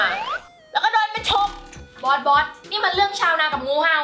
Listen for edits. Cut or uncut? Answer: uncut